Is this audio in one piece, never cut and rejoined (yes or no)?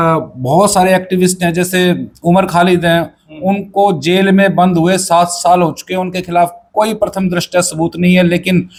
yes